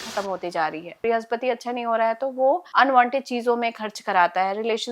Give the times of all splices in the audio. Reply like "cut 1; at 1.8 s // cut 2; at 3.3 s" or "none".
cut 1; at 1.0 s // cut 2; at 2.7 s